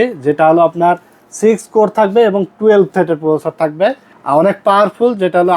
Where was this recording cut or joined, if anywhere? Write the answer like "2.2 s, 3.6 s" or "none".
4.1 s